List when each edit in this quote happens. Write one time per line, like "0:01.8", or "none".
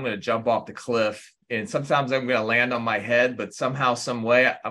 0:01.4